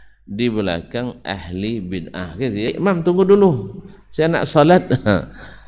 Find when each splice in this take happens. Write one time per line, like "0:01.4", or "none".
0:02.7